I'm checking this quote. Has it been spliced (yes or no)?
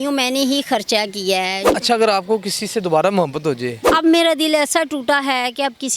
yes